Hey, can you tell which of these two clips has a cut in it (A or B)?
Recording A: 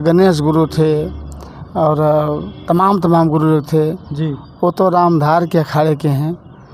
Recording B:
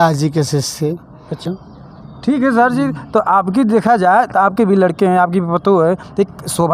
B